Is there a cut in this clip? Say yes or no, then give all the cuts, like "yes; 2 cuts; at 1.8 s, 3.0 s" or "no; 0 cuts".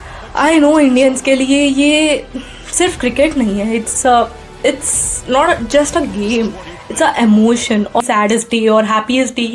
yes; 1 cut; at 8.0 s